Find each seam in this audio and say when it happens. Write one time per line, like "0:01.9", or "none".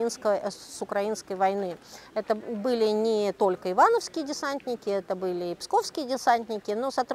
none